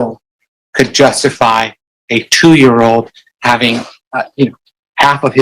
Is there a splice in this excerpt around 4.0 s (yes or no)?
yes